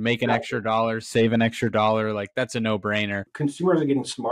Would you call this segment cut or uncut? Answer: cut